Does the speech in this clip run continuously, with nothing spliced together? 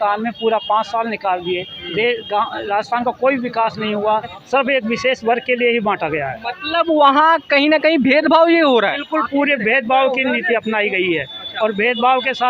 no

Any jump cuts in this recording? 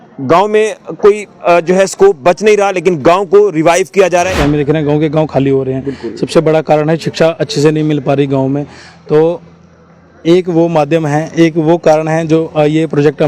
yes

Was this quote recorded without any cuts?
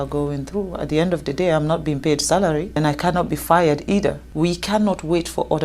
no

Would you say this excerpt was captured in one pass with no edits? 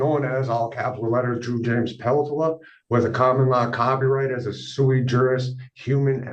yes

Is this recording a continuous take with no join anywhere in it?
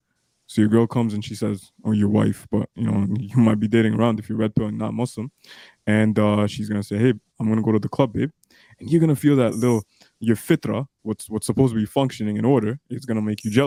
yes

